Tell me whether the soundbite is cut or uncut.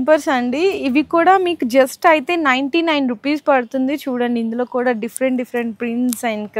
uncut